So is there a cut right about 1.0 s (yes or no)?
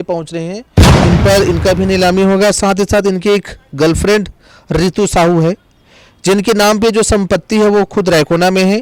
yes